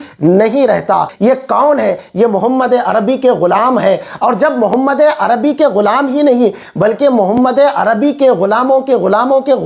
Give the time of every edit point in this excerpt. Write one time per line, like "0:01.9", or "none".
0:01.1